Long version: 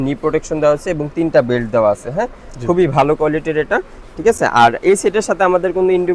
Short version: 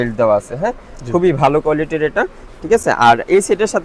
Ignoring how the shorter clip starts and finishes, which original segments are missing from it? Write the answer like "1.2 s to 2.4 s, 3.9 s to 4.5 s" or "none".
none